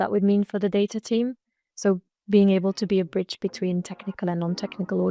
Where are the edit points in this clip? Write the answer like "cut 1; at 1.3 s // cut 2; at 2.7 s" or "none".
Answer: none